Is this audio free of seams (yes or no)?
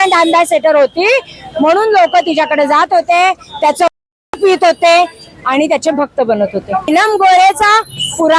no